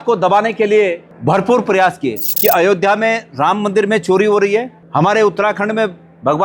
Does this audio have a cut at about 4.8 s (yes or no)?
yes